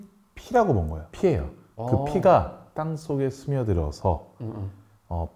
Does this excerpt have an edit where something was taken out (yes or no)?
yes